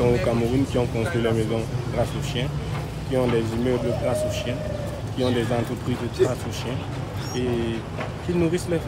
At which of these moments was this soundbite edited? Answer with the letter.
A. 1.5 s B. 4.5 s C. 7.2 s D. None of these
D